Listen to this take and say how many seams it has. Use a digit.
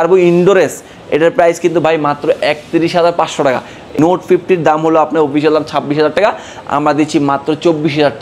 1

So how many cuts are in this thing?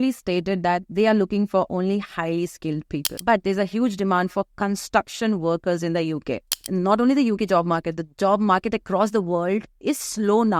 2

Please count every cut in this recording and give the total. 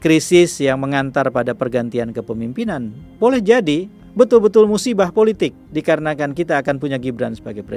1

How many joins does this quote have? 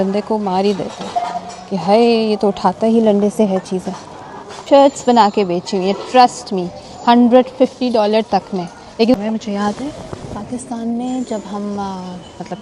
2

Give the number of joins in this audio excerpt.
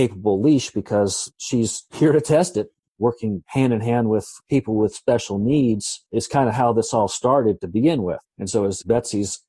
2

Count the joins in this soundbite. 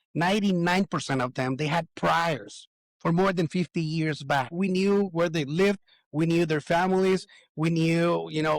1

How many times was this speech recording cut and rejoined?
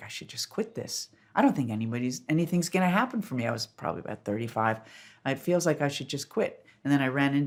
0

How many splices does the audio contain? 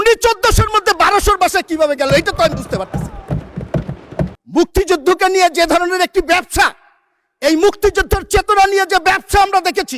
1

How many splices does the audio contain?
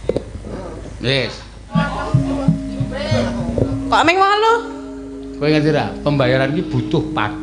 1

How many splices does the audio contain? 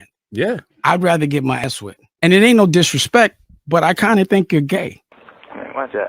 1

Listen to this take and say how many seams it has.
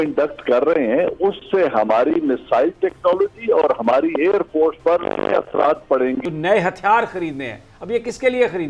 1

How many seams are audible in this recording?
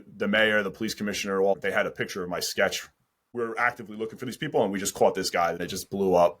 3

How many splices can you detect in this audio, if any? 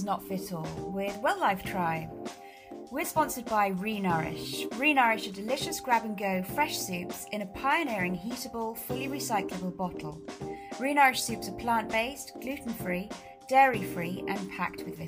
0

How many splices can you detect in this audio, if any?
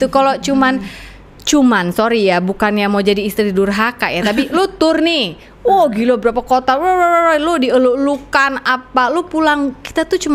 0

